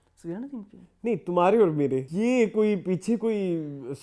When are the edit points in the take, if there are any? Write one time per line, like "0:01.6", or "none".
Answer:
0:02.1